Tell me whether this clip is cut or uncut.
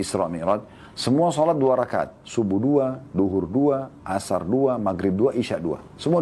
uncut